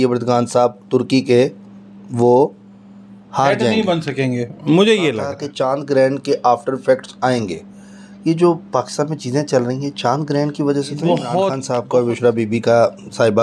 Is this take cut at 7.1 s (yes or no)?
no